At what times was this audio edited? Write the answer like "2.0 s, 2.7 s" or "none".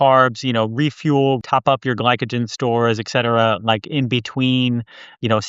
1.4 s